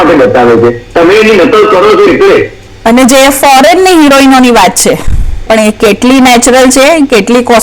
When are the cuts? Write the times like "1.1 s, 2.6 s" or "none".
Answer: 2.6 s, 5.4 s